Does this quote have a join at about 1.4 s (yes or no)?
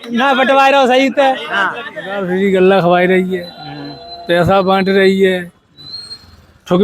yes